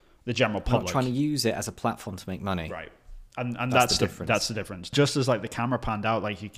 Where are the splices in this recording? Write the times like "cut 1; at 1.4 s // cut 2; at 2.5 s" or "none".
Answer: cut 1; at 4.9 s